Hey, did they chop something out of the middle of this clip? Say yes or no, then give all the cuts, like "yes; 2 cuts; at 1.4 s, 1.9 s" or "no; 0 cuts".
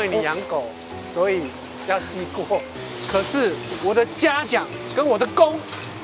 no; 0 cuts